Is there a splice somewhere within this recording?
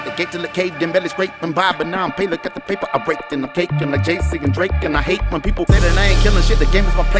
no; 0 cuts

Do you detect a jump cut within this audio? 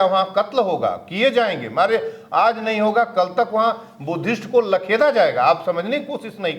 no; 0 cuts

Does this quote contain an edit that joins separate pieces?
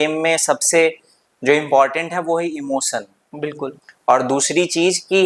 no; 0 cuts

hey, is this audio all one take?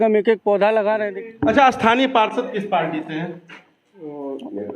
no; 1 cut; at 1.1 s

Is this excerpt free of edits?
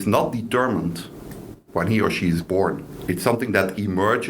no; 1 cut; at 2.9 s

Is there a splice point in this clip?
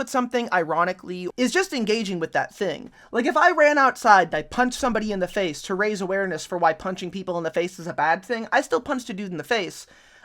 yes; 1 cut; at 1.1 s

